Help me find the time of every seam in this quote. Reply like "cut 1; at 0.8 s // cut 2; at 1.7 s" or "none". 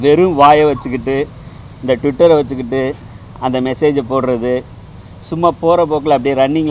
none